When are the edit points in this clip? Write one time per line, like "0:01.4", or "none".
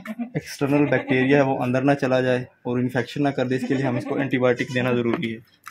none